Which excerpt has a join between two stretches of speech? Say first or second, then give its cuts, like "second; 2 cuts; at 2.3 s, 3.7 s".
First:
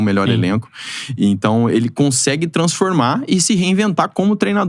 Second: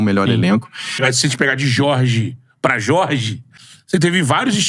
second; 1 cut; at 1.1 s